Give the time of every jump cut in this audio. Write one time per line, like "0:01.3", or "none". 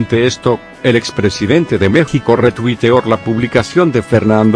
none